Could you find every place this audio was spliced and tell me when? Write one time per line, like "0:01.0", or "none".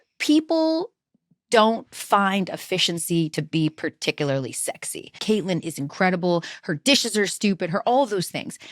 0:05.2